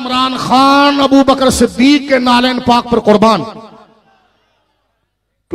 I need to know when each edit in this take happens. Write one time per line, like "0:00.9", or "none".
none